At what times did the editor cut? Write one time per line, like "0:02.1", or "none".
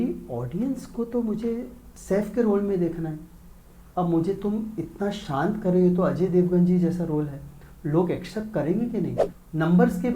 0:09.3